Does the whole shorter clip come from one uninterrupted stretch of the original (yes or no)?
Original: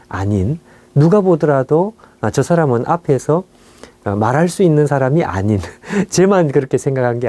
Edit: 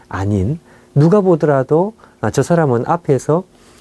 yes